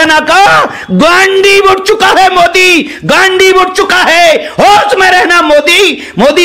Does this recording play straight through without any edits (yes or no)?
yes